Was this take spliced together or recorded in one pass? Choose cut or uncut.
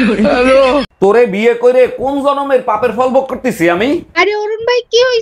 cut